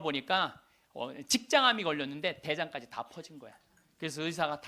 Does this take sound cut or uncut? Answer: uncut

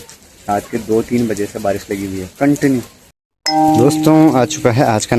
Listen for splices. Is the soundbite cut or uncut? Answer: cut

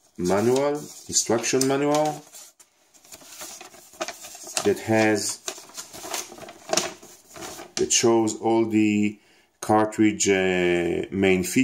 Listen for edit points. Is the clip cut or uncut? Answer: uncut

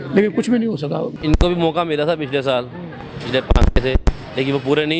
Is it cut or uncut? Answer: cut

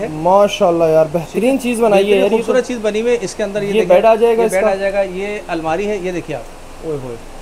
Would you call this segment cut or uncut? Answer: uncut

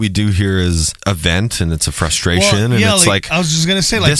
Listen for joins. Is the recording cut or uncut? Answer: cut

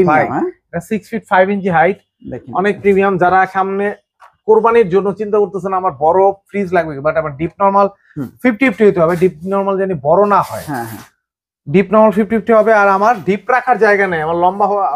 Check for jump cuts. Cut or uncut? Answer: uncut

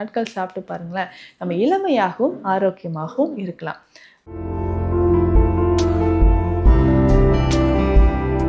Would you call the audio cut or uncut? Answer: cut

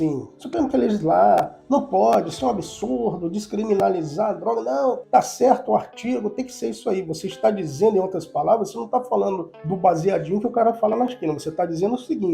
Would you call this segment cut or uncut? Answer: cut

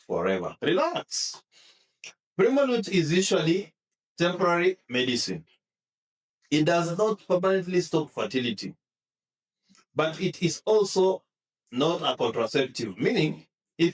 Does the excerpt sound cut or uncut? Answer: cut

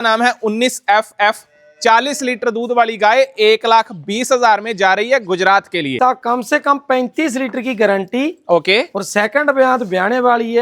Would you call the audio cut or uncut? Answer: cut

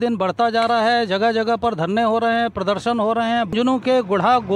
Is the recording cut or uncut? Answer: cut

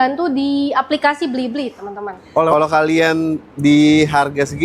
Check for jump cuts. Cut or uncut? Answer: cut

